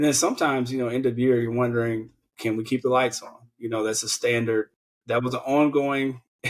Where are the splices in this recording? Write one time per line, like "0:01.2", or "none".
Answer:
0:02.3